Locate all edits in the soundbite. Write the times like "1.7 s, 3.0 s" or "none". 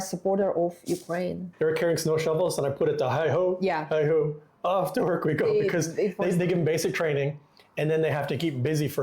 1.4 s